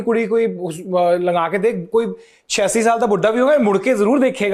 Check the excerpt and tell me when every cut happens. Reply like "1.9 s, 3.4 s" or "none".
none